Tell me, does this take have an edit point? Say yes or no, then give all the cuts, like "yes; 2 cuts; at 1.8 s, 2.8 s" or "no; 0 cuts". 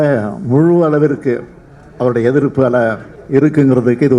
yes; 1 cut; at 3.1 s